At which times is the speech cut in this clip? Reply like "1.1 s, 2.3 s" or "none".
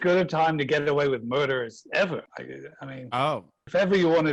none